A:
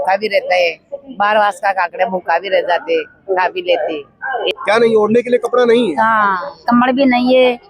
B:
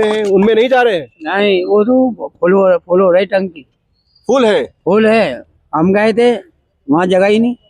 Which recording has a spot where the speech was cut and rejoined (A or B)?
A